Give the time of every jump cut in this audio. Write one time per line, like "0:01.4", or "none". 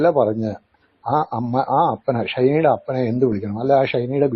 none